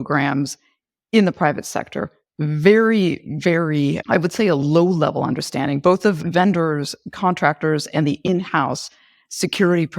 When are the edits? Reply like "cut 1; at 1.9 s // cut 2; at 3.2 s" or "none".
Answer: cut 1; at 6.2 s